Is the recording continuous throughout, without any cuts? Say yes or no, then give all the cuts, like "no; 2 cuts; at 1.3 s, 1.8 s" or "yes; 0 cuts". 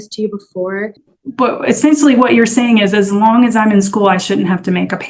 no; 1 cut; at 1.0 s